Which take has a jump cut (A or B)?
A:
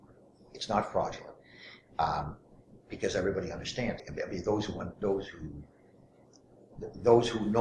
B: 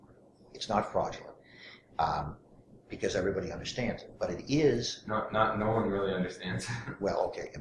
A